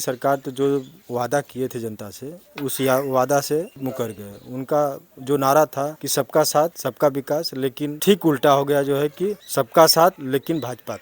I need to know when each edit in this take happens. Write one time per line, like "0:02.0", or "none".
0:03.7
0:06.0
0:06.8
0:08.0
0:09.4
0:10.2